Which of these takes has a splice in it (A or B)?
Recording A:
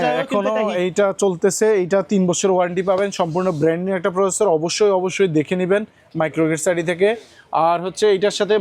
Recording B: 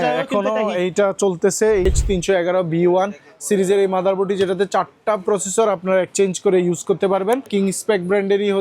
B